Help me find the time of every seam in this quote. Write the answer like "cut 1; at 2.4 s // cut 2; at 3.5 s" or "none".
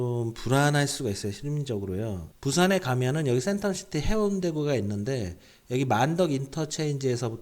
cut 1; at 2.3 s